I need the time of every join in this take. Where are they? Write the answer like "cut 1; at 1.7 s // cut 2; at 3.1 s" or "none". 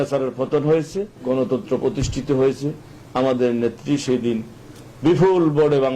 cut 1; at 1.1 s